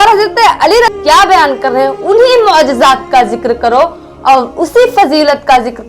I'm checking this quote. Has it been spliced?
yes; 1 cut; at 0.9 s

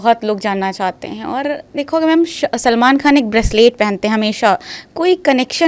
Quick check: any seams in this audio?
no; 0 cuts

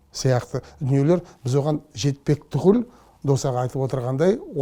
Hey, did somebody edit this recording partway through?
no; 0 cuts

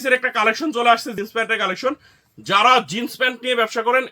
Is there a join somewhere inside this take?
yes; 1 cut; at 1.1 s

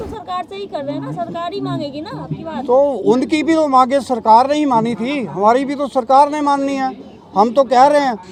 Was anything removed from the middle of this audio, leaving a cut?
no; 0 cuts

